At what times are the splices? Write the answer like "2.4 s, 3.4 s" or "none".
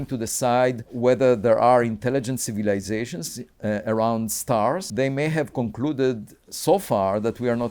0.9 s, 4.9 s